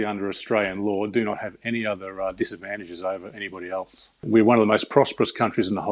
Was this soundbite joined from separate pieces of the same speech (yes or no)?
yes